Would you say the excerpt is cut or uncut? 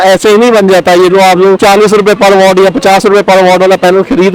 uncut